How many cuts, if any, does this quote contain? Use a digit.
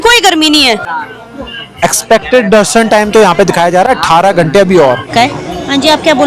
2